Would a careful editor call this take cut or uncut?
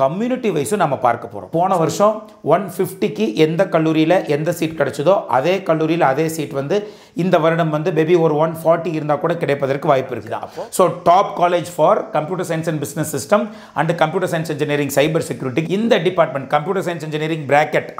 cut